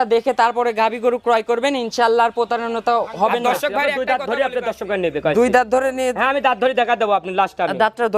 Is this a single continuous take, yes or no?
no